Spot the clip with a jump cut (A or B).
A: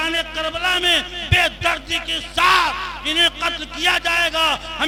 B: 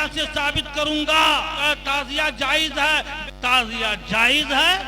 B